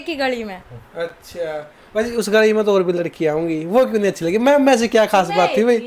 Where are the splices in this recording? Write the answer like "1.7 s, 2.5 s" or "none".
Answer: none

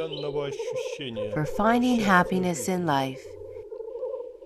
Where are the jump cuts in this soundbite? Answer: 2.1 s

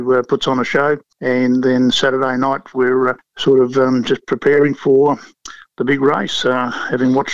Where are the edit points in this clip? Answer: 1.1 s, 3.3 s

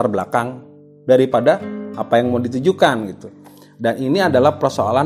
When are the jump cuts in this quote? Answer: none

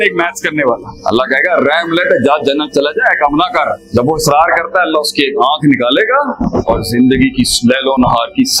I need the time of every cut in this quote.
0.9 s, 3.8 s, 6.4 s

